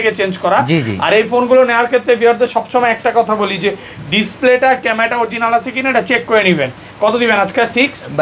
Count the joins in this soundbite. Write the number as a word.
zero